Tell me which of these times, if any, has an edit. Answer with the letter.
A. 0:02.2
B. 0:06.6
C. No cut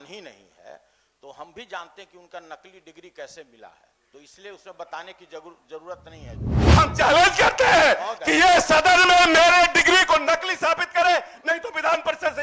B